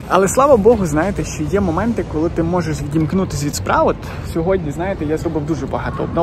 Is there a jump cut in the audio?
no; 0 cuts

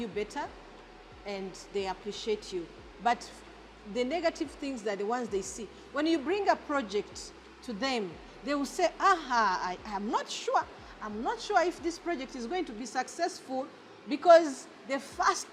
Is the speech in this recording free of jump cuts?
yes; 0 cuts

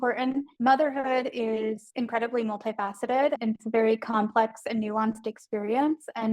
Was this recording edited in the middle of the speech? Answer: yes; 2 cuts; at 1.8 s, 3.4 s

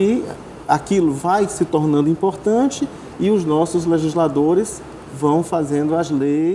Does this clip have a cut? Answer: no; 0 cuts

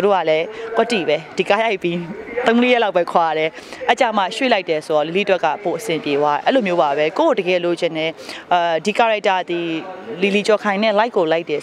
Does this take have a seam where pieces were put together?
no; 0 cuts

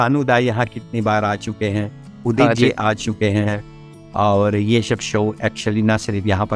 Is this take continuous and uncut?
yes; 0 cuts

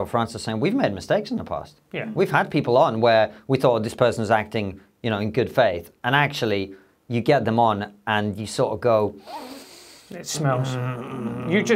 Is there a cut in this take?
no; 0 cuts

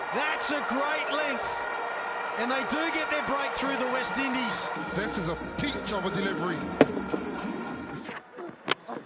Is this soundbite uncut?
no; 2 cuts; at 4.8 s, 7.9 s

